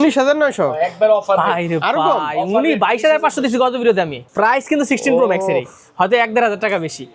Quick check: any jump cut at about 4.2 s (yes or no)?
yes